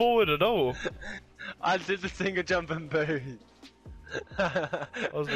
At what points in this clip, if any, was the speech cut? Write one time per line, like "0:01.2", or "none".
none